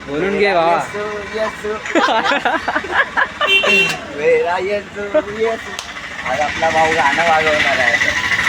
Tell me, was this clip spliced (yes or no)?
yes